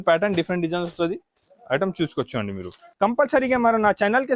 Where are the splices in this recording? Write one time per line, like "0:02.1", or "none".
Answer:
0:02.9